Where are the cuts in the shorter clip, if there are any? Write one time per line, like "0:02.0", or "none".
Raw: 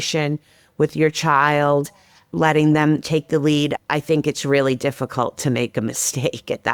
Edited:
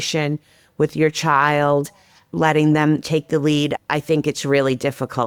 none